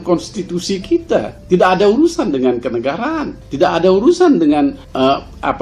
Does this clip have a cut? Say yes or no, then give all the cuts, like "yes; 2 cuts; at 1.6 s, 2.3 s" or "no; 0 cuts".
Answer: no; 0 cuts